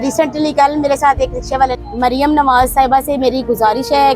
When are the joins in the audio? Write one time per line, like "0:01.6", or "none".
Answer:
0:01.8